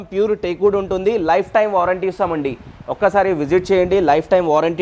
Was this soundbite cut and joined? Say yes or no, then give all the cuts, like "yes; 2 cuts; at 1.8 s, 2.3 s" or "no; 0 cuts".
no; 0 cuts